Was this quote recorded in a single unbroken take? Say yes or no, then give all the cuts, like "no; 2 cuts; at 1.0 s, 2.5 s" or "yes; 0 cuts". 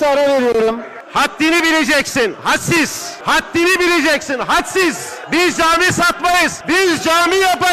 no; 4 cuts; at 0.9 s, 3.1 s, 5.1 s, 6.6 s